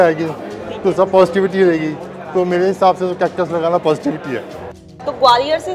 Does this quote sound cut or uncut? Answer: cut